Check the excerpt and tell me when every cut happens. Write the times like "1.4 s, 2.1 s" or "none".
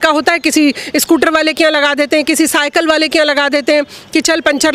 none